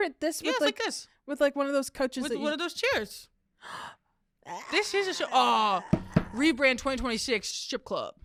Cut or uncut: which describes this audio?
uncut